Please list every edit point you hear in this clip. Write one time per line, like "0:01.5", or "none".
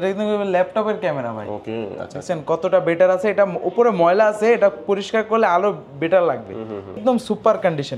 0:07.0